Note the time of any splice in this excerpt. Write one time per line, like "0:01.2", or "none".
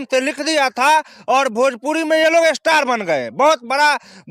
none